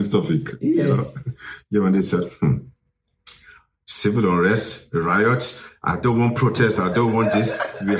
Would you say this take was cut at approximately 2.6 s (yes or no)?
no